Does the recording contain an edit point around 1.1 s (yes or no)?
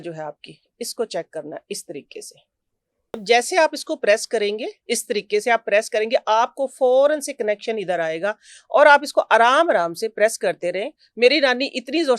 no